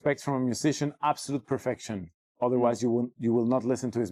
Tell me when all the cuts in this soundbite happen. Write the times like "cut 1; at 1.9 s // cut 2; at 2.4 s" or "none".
none